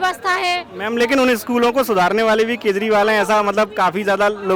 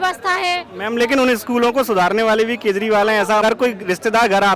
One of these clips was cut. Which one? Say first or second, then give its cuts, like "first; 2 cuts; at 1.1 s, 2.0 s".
second; 1 cut; at 3.4 s